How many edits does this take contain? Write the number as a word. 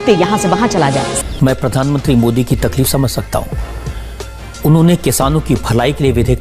one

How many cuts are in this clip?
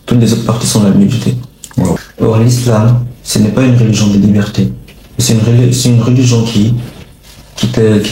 one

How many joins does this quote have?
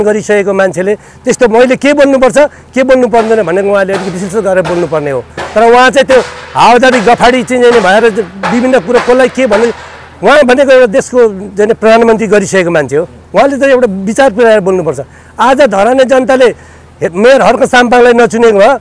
zero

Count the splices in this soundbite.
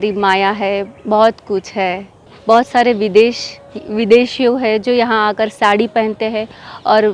one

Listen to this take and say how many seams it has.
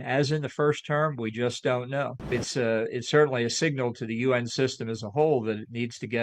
one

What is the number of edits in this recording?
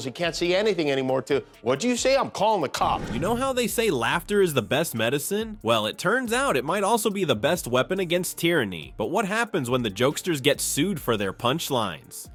zero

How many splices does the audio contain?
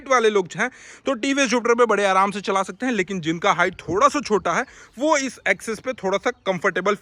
zero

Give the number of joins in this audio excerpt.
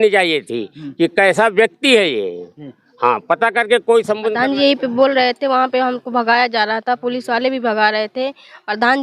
one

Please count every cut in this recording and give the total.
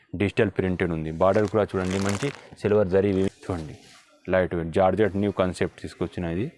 one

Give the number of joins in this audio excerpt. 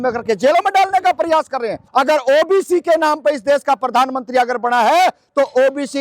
one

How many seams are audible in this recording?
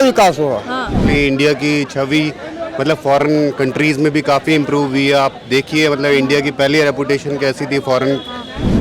one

